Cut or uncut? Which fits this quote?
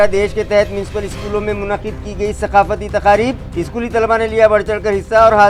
uncut